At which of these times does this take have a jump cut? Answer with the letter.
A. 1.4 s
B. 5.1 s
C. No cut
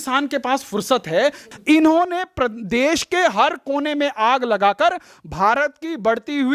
A